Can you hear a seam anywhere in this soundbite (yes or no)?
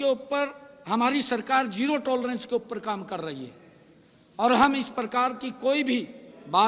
no